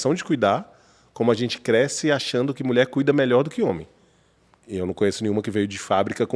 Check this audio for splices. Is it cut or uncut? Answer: uncut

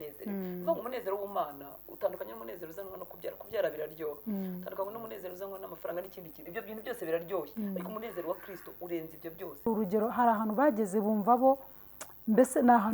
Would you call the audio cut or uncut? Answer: cut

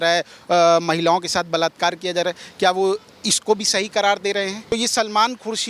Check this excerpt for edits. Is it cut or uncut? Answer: cut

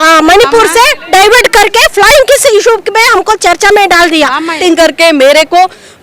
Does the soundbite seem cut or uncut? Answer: cut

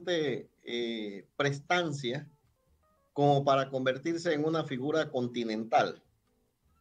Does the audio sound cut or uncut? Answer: uncut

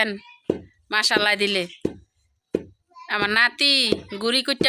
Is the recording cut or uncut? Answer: uncut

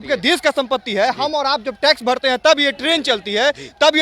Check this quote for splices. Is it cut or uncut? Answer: uncut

